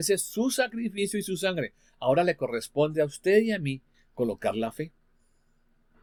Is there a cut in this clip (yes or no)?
no